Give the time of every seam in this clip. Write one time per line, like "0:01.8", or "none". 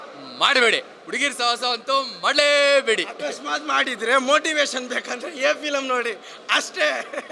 none